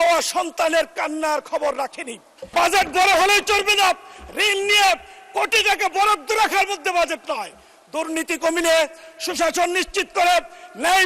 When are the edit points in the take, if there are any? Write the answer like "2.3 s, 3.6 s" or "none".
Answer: 2.4 s